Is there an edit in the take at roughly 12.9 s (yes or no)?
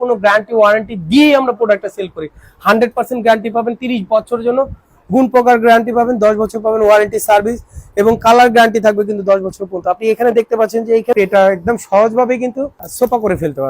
yes